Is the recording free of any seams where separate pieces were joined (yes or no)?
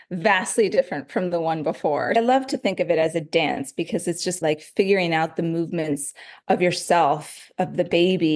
no